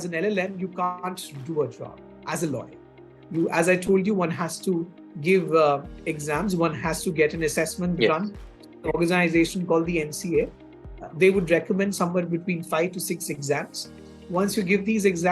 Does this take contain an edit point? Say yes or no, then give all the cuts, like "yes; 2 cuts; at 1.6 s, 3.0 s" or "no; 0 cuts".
no; 0 cuts